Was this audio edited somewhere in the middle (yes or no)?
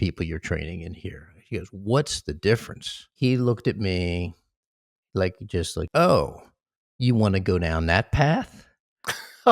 yes